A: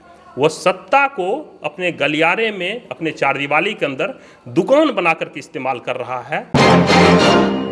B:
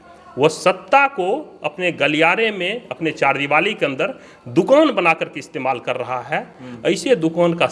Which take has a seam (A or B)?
A